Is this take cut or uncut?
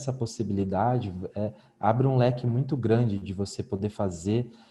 uncut